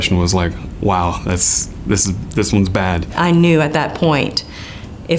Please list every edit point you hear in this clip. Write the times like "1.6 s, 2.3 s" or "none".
3.1 s